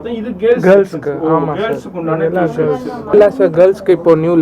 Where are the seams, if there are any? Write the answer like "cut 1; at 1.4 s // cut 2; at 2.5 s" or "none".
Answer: cut 1; at 3.0 s